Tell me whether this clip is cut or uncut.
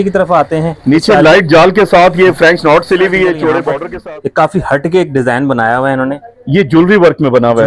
cut